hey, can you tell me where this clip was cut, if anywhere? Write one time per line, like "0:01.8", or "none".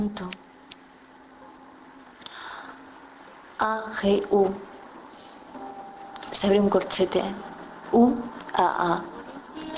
0:01.9